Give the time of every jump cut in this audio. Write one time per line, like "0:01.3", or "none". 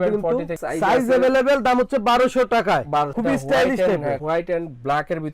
0:03.1

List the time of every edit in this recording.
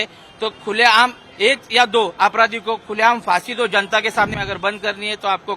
0:04.3

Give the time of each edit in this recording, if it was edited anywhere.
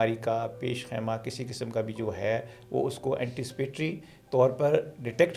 none

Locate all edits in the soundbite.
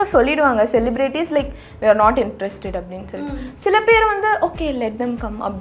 none

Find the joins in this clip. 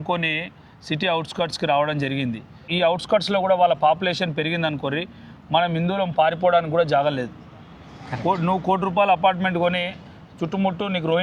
0:02.7

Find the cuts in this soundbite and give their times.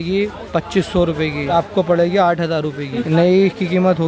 0:01.5
0:02.9

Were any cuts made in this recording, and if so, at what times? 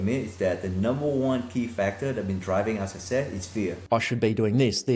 0:03.8

